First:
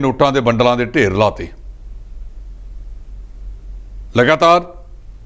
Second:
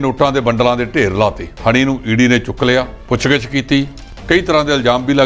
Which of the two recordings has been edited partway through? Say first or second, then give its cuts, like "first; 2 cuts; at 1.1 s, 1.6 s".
second; 3 cuts; at 1.5 s, 3.0 s, 4.1 s